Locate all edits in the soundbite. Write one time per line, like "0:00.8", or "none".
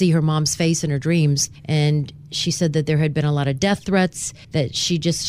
0:01.5
0:04.3